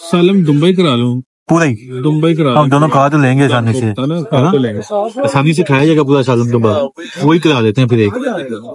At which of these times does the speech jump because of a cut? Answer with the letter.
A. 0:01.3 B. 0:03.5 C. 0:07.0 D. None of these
A